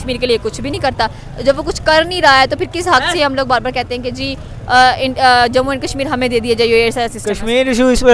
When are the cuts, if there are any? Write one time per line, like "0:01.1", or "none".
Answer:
0:07.2